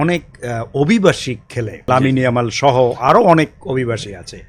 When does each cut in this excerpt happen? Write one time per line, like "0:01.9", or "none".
0:01.8